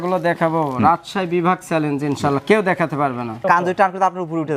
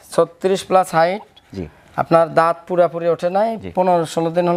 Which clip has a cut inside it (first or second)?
first